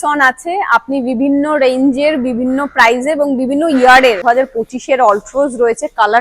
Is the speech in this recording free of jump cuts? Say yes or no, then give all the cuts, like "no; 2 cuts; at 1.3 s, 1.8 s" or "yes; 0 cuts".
no; 1 cut; at 4.2 s